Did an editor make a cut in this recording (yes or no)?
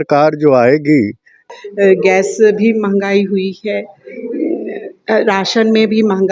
yes